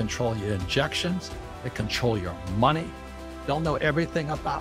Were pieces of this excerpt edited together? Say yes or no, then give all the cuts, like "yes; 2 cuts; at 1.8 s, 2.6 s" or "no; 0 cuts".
yes; 1 cut; at 3.3 s